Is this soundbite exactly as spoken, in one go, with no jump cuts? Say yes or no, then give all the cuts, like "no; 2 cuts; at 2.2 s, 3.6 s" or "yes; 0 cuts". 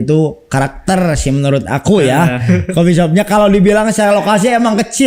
yes; 0 cuts